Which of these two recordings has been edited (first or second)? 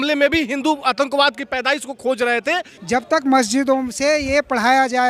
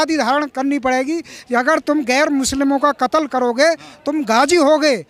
first